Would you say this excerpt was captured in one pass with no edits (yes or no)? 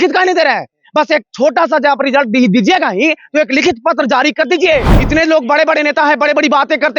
yes